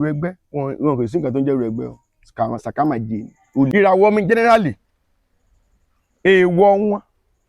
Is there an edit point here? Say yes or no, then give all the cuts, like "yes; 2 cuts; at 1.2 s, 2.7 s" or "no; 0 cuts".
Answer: yes; 1 cut; at 3.7 s